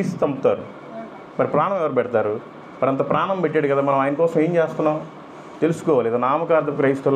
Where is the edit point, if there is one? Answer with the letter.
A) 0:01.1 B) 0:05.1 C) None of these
C